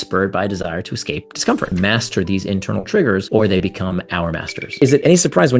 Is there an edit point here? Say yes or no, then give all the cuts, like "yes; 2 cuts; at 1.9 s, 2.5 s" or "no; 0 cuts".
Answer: yes; 2 cuts; at 1.7 s, 4.8 s